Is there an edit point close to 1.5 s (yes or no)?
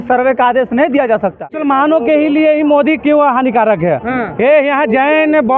yes